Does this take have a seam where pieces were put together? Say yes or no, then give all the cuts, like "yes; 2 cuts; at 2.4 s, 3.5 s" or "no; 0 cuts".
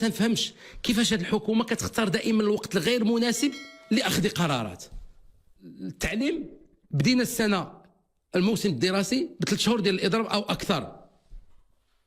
yes; 1 cut; at 5.8 s